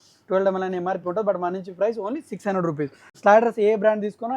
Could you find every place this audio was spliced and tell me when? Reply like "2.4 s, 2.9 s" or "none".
3.2 s